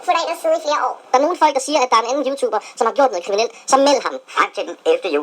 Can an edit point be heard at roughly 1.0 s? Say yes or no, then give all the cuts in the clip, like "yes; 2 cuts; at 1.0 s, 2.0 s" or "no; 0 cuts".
yes; 1 cut; at 1.0 s